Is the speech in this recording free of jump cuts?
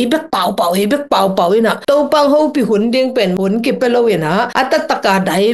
no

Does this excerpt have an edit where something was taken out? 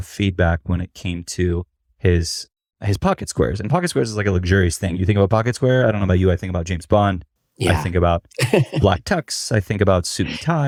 no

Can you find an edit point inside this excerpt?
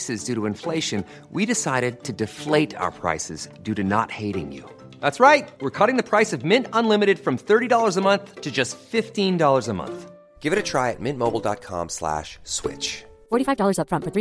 no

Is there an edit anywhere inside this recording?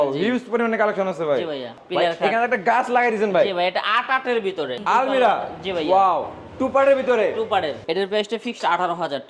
yes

